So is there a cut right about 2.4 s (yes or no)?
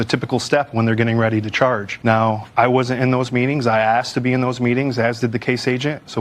yes